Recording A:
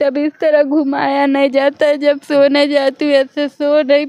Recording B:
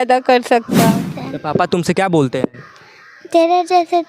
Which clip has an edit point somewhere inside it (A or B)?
B